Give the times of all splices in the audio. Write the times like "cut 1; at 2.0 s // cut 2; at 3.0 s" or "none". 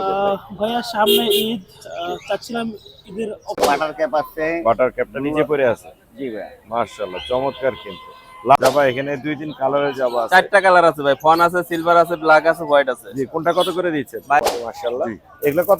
cut 1; at 3.6 s // cut 2; at 8.6 s // cut 3; at 14.5 s